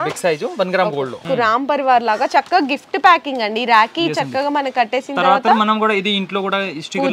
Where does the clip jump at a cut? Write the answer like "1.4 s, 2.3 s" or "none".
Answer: 1.2 s